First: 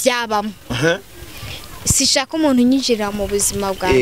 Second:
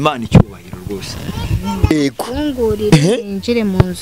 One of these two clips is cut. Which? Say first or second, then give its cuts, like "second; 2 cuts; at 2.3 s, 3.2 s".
second; 1 cut; at 1.9 s